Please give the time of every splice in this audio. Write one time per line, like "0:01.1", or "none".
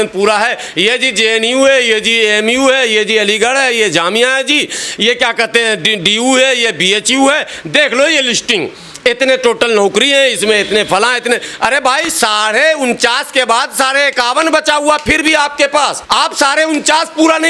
none

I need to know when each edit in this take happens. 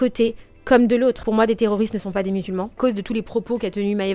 0:01.2
0:02.8

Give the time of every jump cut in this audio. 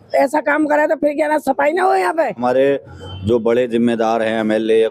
0:02.4

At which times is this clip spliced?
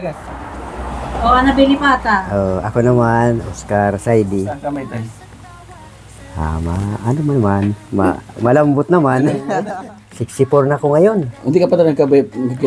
0:04.6
0:09.5

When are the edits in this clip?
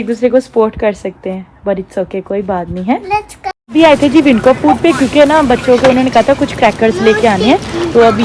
none

